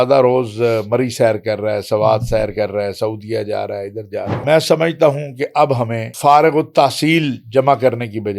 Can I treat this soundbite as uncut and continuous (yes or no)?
no